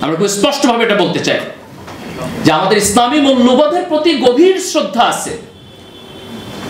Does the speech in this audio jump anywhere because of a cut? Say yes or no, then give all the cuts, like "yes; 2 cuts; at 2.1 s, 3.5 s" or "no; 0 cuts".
no; 0 cuts